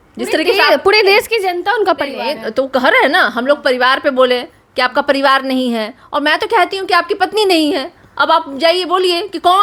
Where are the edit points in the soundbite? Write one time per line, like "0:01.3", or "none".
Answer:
none